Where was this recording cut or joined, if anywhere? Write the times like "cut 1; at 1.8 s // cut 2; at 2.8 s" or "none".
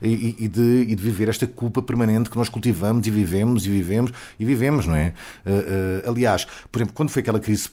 none